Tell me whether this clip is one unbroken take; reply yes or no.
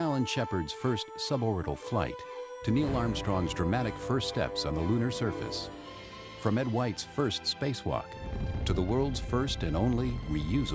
no